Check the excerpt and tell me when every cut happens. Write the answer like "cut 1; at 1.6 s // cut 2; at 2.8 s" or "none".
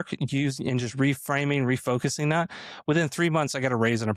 none